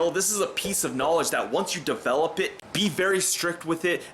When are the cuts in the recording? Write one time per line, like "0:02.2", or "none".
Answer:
0:02.5